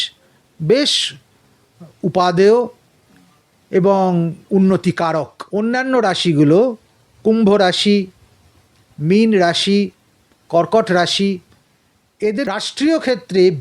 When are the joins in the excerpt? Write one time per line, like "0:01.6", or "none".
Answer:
0:05.4
0:12.5